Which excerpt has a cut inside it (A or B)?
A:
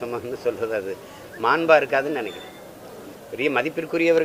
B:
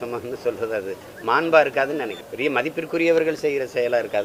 B